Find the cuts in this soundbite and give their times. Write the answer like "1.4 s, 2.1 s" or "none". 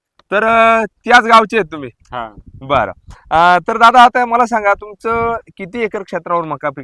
none